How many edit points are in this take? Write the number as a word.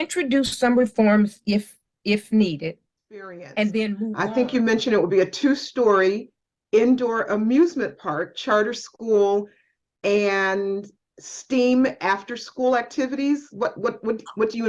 one